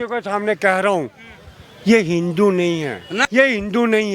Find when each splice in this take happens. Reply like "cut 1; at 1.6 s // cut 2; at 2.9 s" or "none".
cut 1; at 3.2 s